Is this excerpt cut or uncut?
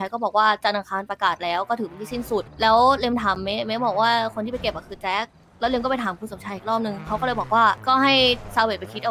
cut